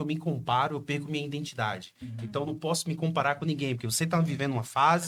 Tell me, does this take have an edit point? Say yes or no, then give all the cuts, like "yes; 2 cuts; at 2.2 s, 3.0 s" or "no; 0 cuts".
no; 0 cuts